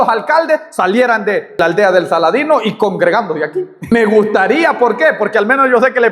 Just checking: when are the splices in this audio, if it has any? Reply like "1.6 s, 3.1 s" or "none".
1.6 s, 3.9 s

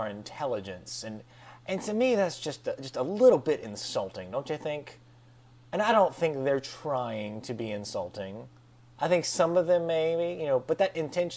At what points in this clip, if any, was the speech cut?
6.7 s

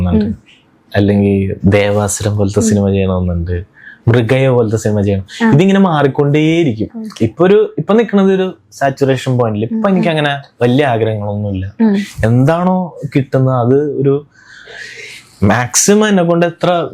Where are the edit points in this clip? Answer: none

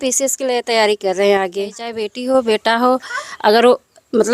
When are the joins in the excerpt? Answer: 2.1 s

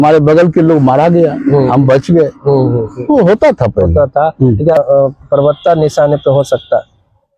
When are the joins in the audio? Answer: 4.8 s

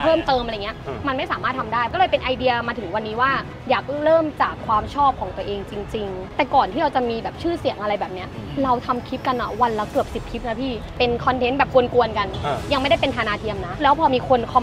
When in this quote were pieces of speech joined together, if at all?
1.9 s, 3.5 s, 6.2 s, 10.8 s

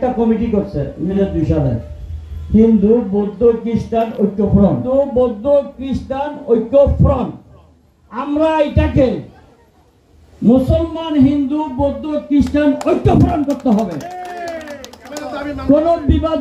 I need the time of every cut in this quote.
1.2 s, 4.8 s

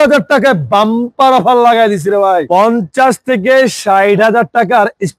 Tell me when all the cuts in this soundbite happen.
2.5 s

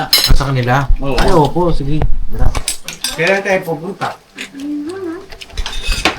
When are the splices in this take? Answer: 2.8 s

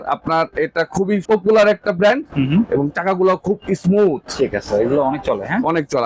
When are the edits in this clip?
1.2 s

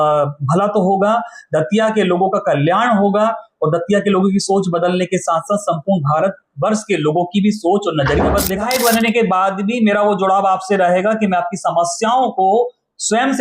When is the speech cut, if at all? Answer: 8.6 s

